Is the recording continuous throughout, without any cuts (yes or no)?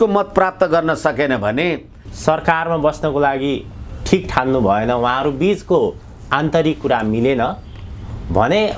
no